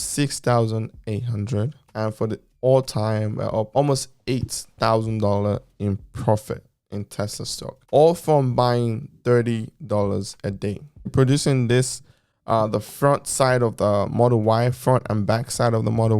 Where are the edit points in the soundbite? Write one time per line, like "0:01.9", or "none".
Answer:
0:11.1